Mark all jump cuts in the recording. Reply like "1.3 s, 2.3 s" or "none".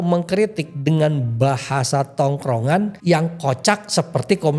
3.0 s

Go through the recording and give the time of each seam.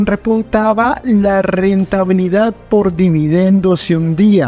none

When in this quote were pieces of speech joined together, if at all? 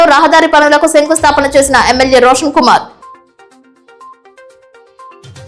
3.0 s

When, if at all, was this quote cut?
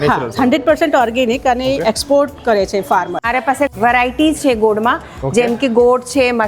3.6 s

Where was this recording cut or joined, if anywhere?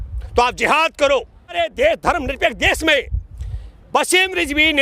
1.5 s

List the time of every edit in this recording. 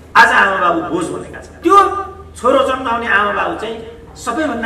1.5 s

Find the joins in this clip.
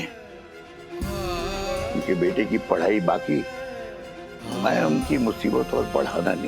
4.5 s

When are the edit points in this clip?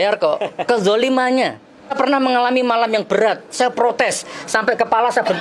1.9 s

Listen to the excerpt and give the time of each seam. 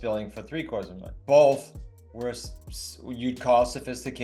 1.0 s

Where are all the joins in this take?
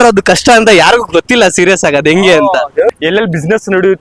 2.9 s

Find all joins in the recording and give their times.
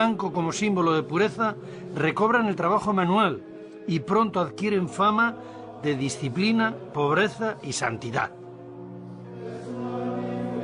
1.3 s

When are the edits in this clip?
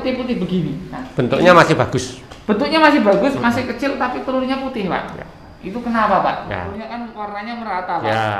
6.8 s

